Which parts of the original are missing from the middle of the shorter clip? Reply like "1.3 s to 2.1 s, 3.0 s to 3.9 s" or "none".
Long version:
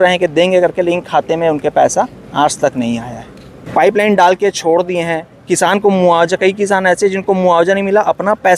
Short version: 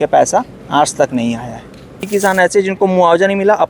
3.7 s to 6.5 s